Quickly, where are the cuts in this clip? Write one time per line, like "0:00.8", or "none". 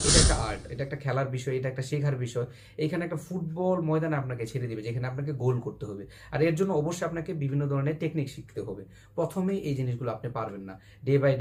none